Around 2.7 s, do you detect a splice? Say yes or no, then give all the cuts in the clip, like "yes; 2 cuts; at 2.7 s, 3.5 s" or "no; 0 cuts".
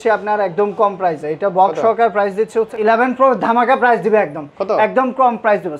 yes; 1 cut; at 2.7 s